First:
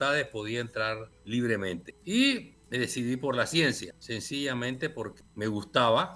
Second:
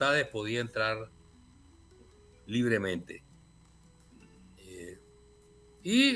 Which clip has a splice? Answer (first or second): first